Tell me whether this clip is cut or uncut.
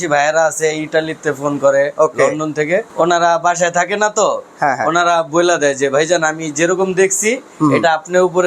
cut